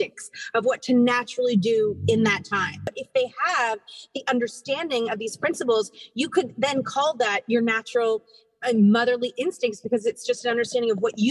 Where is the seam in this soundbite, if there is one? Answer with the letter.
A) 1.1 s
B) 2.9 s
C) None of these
B